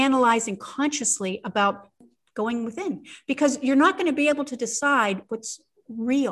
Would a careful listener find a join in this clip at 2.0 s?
yes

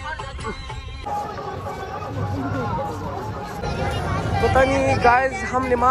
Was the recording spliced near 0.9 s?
yes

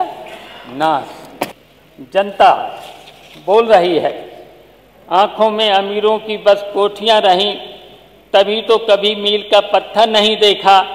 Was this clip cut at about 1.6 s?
yes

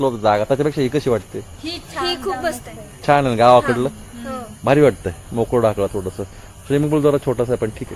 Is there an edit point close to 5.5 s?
no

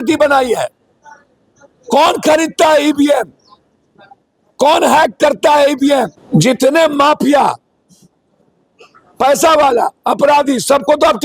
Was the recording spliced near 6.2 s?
yes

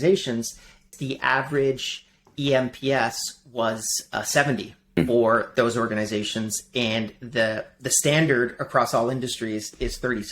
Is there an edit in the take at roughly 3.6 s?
no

